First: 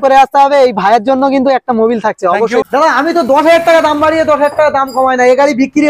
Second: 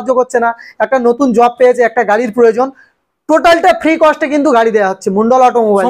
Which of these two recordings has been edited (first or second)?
first